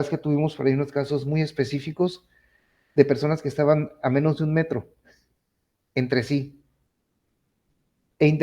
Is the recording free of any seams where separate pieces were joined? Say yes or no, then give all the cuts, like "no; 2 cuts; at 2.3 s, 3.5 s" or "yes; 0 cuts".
yes; 0 cuts